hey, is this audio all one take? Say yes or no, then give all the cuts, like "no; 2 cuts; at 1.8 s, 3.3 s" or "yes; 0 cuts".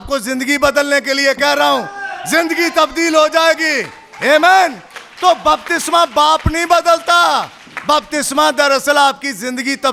yes; 0 cuts